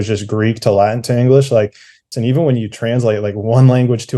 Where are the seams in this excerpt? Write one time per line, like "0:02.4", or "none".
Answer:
0:02.1